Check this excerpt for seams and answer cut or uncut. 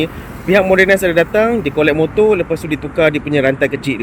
uncut